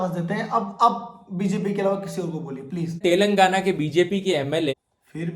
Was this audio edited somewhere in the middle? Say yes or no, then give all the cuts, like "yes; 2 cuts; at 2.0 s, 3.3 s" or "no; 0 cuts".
yes; 1 cut; at 2.9 s